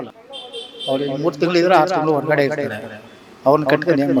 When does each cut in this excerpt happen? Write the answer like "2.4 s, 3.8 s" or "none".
none